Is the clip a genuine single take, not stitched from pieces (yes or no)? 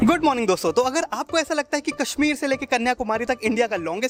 yes